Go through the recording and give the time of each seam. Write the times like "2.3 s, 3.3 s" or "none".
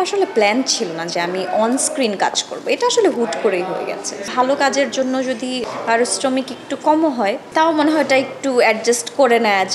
4.3 s, 5.6 s, 7.4 s